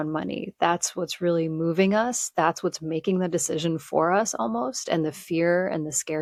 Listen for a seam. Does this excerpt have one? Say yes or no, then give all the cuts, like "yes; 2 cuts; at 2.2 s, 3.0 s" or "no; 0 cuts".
no; 0 cuts